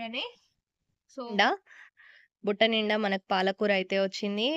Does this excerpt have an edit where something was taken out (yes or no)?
yes